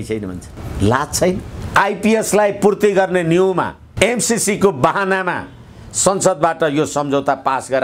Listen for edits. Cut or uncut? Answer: cut